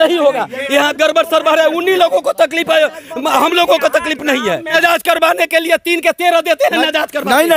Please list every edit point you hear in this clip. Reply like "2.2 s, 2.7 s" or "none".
4.7 s